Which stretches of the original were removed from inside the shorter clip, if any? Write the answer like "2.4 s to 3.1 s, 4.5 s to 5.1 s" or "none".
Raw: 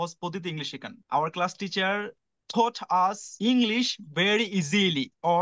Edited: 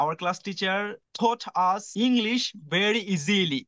2.2 s to 2.4 s, 3.2 s to 3.3 s